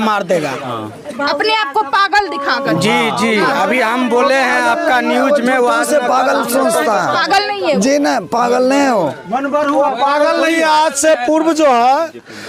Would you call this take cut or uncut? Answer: uncut